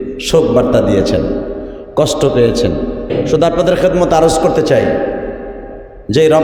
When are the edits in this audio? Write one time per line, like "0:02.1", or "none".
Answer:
none